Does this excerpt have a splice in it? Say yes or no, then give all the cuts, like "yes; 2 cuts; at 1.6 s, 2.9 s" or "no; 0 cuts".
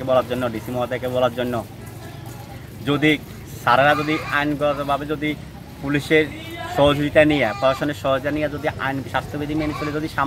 no; 0 cuts